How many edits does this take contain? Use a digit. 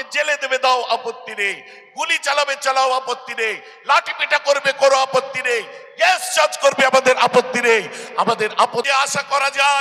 1